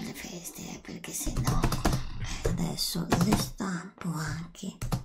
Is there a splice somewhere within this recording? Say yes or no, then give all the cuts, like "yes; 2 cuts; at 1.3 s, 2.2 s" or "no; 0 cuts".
yes; 1 cut; at 1.4 s